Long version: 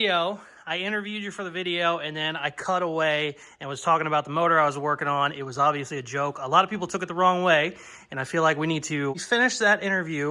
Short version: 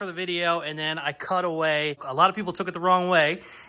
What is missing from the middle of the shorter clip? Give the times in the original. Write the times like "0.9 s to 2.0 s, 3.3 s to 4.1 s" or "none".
3.4 s to 6.4 s